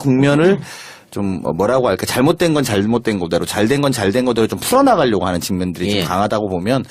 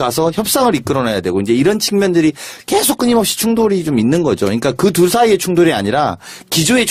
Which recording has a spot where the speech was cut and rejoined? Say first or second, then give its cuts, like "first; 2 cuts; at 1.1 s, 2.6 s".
first; 1 cut; at 5.5 s